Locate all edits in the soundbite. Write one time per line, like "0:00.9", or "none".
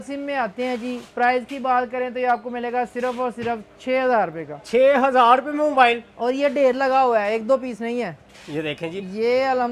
none